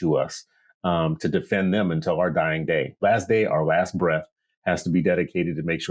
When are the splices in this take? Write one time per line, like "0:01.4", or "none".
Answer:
0:03.0